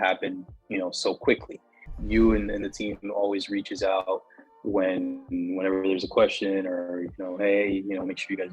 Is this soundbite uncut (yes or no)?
no